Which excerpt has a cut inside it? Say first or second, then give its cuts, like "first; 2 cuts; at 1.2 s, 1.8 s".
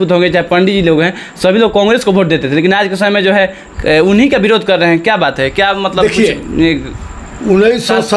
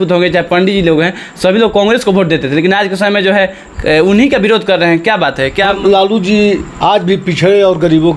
second; 1 cut; at 5.8 s